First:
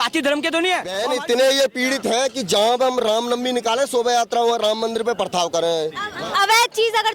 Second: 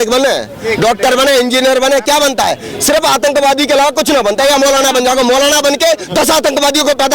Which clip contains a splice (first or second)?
first